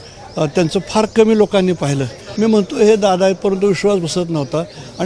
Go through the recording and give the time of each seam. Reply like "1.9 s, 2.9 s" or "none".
2.2 s